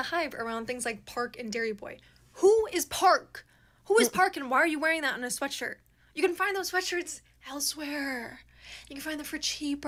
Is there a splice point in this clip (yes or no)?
no